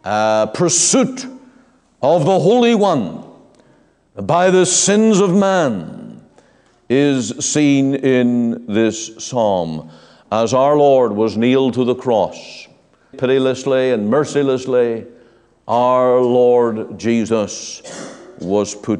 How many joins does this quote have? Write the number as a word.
one